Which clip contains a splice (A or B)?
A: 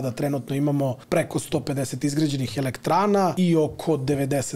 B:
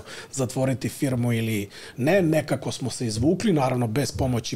A